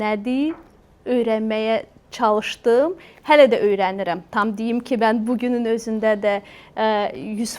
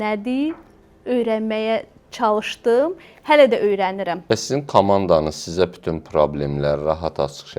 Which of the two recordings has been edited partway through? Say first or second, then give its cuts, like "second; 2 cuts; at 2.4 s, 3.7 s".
second; 1 cut; at 4.1 s